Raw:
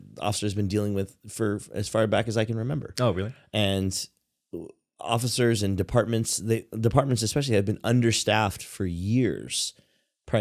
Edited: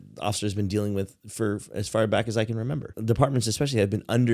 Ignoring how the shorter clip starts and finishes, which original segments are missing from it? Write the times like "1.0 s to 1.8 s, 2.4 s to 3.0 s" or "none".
2.9 s to 6.7 s